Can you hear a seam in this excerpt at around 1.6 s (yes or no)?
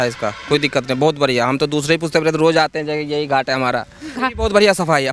no